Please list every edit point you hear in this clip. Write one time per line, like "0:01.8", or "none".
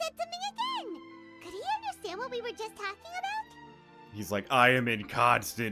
none